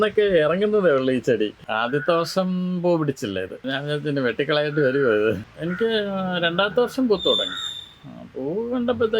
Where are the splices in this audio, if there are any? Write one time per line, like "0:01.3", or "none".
0:01.7
0:03.6
0:05.5